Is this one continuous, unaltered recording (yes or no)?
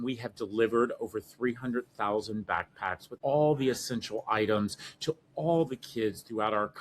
no